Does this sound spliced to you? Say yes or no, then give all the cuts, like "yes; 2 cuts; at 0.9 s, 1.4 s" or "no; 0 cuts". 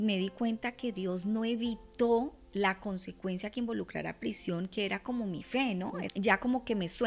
yes; 1 cut; at 6.1 s